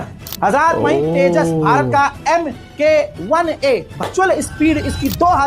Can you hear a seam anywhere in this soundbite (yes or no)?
yes